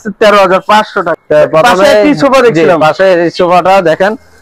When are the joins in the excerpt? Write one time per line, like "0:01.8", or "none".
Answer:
0:01.2